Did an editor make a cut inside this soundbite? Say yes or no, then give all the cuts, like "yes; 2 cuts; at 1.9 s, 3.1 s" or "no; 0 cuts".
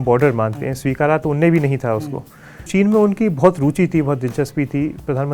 yes; 1 cut; at 2.6 s